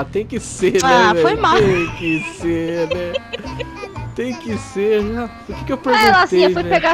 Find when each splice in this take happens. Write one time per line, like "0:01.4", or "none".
none